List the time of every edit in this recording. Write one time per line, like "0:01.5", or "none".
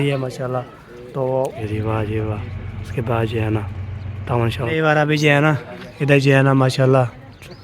0:01.6
0:04.6